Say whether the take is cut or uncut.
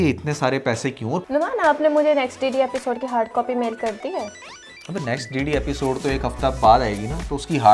cut